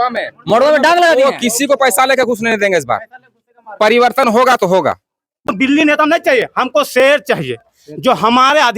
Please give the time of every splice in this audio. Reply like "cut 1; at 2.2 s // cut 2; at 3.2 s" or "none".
cut 1; at 5.5 s

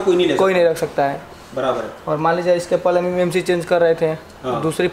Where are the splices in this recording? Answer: none

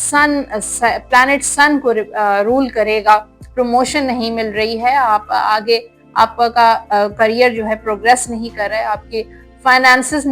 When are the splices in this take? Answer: cut 1; at 3.4 s

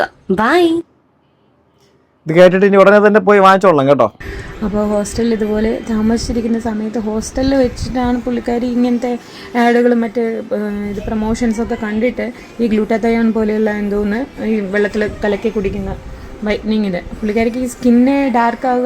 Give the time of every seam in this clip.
cut 1; at 4.2 s

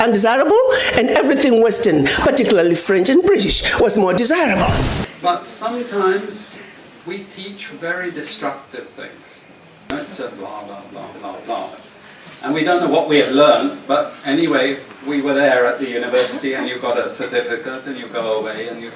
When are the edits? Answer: cut 1; at 5.0 s // cut 2; at 9.9 s

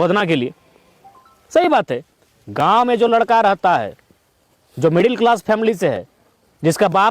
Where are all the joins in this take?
none

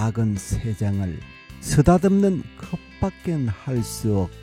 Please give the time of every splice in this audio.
none

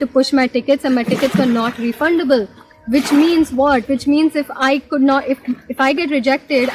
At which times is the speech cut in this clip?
none

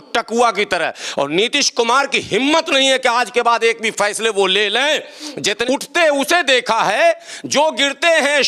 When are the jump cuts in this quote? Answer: cut 1; at 5.4 s

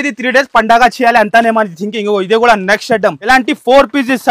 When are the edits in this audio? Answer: cut 1; at 3.2 s

